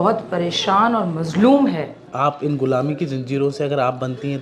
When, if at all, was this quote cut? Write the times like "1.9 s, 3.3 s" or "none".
2.1 s